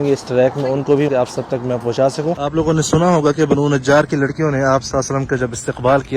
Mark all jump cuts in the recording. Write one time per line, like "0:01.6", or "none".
0:01.1
0:02.4